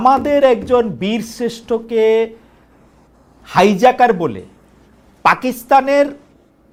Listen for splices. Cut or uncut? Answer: uncut